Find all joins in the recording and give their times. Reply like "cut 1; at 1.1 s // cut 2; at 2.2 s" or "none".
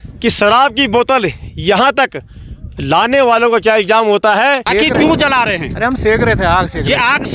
cut 1; at 4.6 s